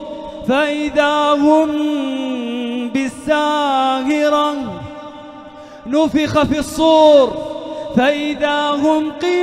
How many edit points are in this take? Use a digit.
0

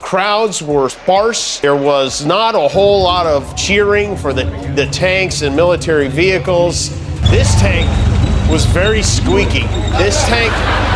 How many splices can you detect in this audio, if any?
1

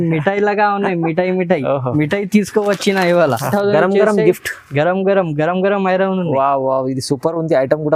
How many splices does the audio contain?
1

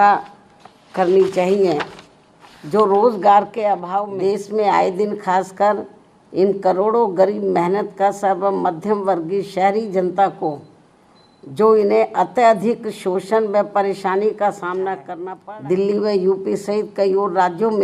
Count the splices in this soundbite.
2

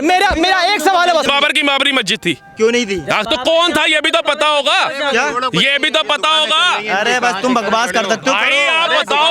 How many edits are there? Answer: 1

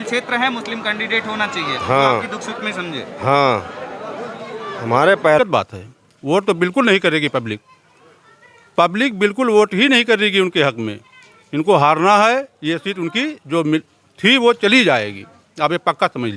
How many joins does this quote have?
1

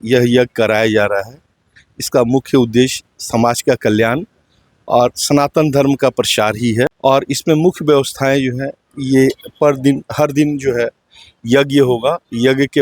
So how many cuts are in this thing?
0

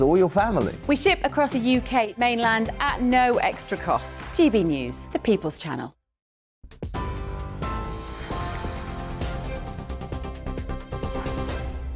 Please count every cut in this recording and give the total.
1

